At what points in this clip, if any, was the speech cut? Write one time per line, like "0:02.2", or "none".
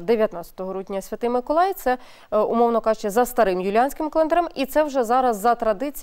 none